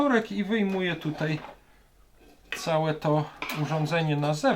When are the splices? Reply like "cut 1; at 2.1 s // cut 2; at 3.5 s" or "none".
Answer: none